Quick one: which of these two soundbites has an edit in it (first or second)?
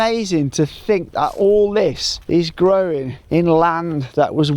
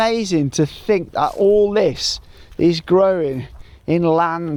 first